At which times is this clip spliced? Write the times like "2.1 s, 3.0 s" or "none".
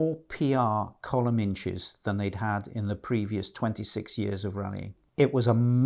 5.0 s